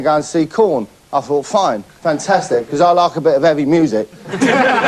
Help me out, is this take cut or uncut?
uncut